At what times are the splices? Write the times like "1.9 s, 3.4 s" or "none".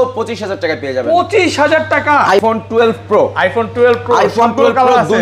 2.4 s